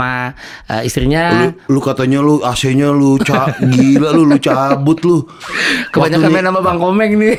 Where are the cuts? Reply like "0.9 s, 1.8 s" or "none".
none